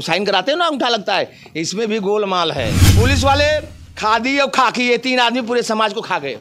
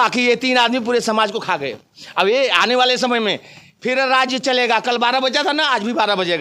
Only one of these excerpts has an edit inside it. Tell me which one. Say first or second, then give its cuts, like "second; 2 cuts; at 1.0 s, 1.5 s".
first; 1 cut; at 2.8 s